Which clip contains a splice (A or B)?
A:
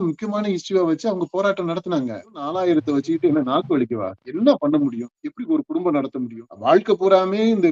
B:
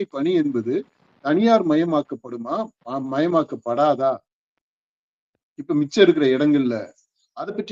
A